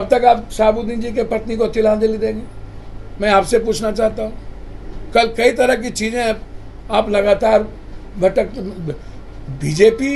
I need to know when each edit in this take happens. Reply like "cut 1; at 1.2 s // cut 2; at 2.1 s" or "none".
none